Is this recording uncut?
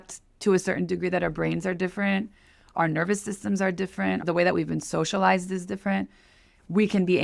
no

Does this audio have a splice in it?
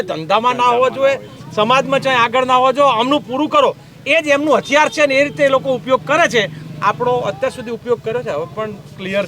no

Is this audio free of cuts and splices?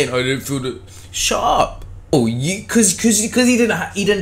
no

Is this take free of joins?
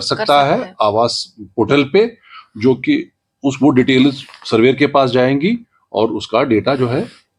yes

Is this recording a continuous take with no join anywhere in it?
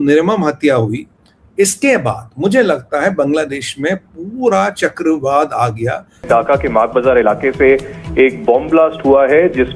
no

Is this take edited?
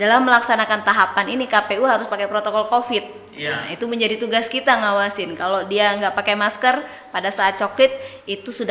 no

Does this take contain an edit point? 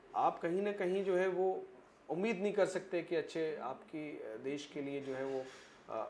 no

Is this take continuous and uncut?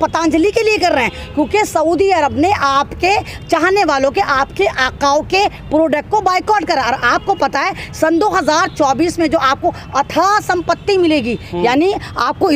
yes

